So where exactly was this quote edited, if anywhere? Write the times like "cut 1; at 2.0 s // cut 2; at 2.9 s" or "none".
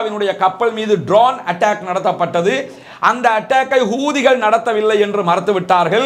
none